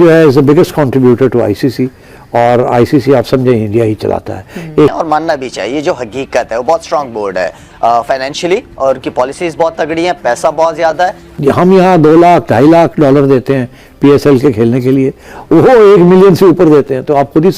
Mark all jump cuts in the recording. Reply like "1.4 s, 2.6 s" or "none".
4.9 s, 11.3 s